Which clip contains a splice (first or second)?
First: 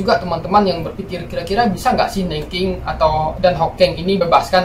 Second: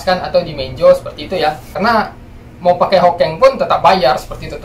second